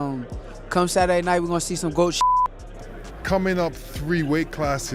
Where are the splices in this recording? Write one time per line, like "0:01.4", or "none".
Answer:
0:02.7

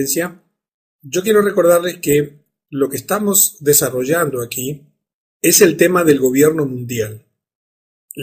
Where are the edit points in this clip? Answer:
0:06.0

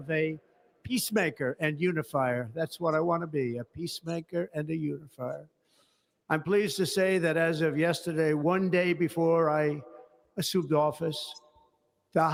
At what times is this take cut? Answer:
none

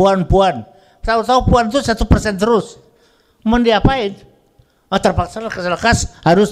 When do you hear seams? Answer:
none

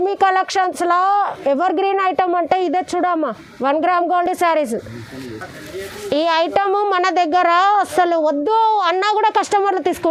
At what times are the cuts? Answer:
none

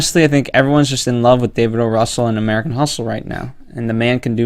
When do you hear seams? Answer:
0:02.7

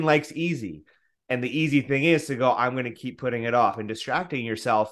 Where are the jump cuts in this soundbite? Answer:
0:03.8

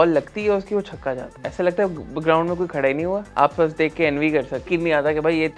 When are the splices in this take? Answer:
0:01.4
0:03.3
0:04.7

